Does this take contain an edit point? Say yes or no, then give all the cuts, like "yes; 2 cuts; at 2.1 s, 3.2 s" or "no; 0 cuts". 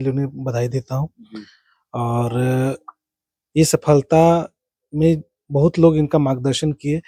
no; 0 cuts